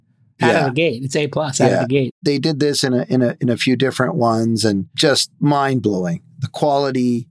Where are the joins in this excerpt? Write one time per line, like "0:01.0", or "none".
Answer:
0:02.1